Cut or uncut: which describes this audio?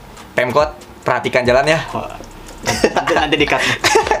uncut